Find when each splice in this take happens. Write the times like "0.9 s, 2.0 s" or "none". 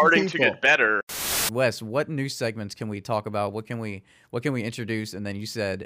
1.1 s